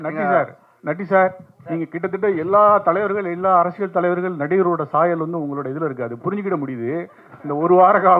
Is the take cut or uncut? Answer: uncut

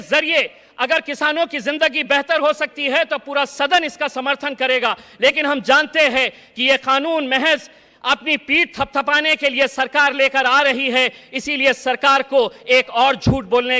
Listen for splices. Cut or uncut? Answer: uncut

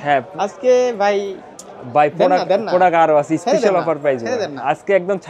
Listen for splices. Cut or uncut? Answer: uncut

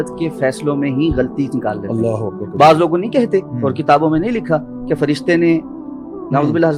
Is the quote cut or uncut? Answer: uncut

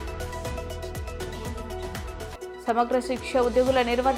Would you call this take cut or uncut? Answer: uncut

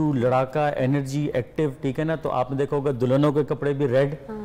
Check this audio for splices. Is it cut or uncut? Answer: uncut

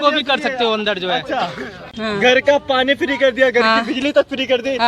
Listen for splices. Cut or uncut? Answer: cut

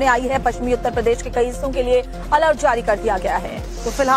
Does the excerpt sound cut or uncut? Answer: uncut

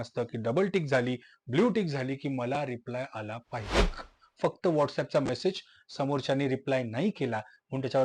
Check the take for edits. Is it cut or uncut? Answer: cut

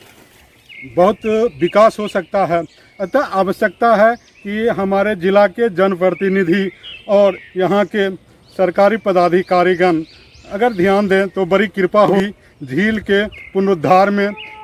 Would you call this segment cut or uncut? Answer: uncut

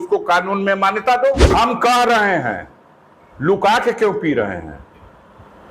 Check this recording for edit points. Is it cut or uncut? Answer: cut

